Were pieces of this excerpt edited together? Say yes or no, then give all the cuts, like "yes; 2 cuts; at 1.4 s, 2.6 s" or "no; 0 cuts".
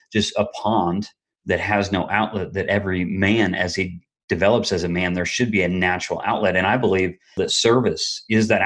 yes; 1 cut; at 7.4 s